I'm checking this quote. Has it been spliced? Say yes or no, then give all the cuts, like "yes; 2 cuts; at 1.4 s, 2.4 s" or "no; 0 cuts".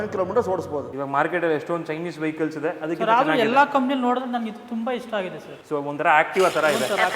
yes; 2 cuts; at 0.9 s, 5.5 s